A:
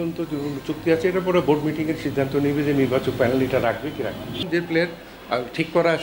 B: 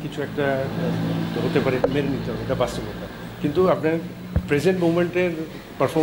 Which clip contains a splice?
A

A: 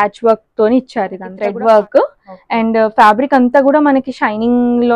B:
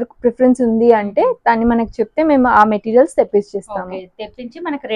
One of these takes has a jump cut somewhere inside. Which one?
A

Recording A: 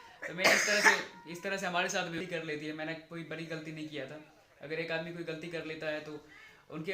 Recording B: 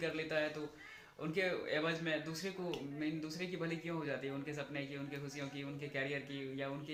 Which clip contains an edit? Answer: A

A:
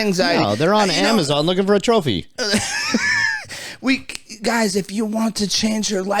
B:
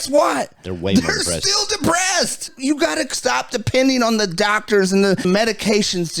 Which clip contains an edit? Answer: B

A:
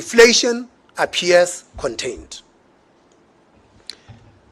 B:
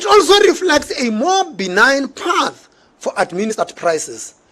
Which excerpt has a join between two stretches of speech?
B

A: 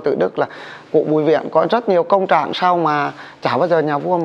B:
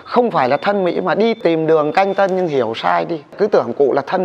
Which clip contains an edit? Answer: B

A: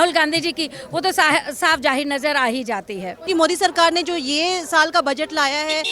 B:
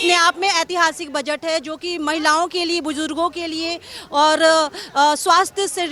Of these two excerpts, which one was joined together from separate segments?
A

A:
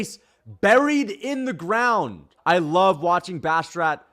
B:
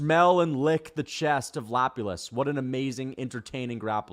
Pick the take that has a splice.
A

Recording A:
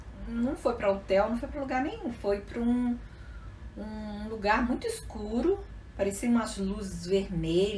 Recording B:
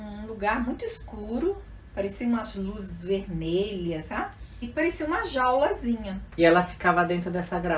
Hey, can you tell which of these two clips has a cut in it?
B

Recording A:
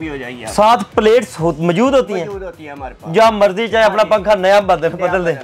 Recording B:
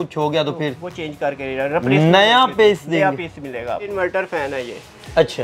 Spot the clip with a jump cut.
B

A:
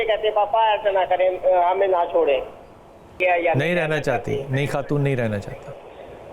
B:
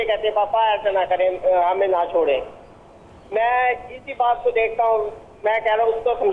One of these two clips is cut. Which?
A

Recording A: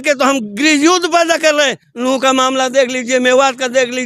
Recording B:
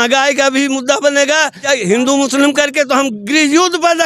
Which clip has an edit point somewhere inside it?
B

